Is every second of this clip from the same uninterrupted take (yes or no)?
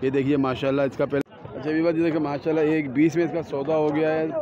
no